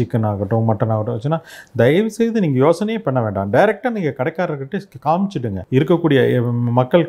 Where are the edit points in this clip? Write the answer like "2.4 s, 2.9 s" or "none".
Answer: 5.6 s